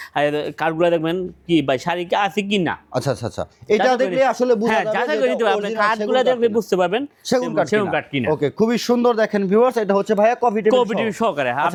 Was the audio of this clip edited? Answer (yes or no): no